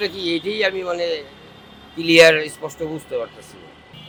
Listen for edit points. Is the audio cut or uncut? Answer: uncut